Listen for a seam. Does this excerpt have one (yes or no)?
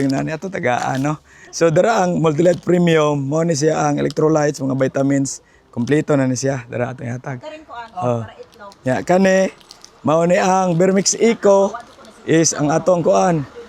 no